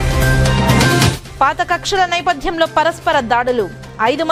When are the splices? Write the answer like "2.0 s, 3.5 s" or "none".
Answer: none